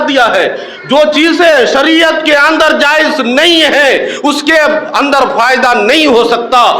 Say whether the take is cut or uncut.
uncut